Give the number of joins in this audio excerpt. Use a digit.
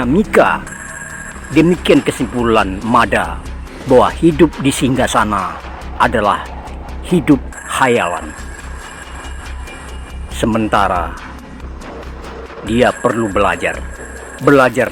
4